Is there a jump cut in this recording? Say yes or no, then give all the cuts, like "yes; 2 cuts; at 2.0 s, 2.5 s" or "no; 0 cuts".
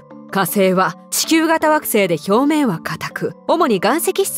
yes; 2 cuts; at 1.1 s, 3.3 s